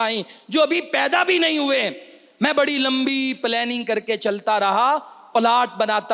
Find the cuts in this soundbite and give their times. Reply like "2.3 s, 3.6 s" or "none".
none